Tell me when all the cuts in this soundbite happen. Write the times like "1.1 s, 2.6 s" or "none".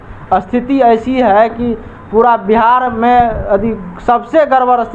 none

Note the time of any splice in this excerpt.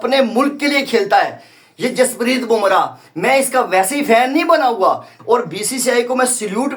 5.1 s

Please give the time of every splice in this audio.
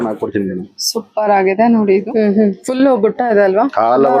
2.0 s

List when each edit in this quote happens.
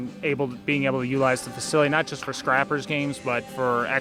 none

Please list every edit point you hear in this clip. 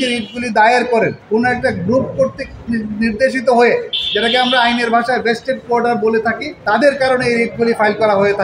1.2 s, 6.5 s

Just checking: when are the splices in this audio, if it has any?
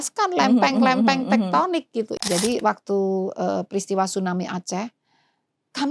2.1 s

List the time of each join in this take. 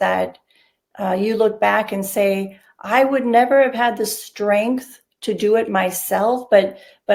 none

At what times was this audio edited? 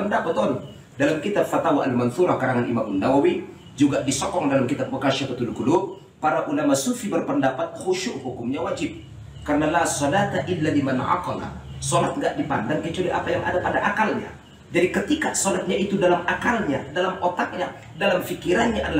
none

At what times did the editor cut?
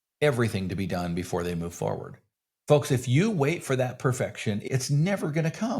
4.6 s

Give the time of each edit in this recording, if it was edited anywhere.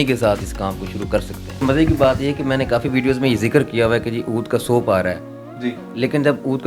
1.6 s

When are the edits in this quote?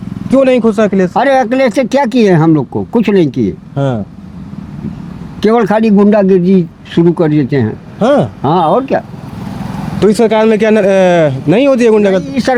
none

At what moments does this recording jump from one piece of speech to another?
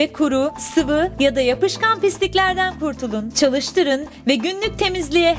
none

